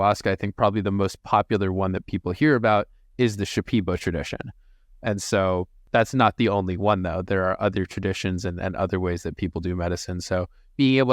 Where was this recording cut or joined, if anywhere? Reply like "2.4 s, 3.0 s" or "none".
5.8 s